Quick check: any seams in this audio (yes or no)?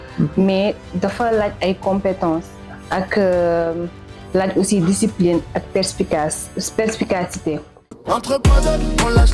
yes